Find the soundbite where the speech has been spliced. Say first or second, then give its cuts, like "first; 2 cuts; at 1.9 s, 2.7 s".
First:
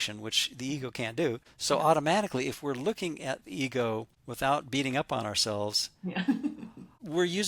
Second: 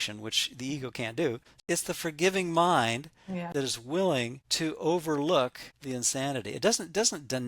second; 2 cuts; at 1.6 s, 3.5 s